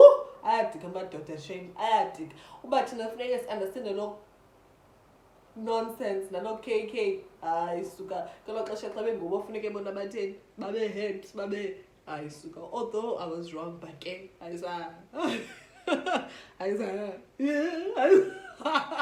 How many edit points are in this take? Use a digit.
0